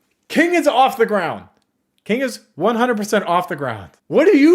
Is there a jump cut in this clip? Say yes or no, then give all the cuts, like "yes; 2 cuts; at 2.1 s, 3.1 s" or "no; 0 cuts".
no; 0 cuts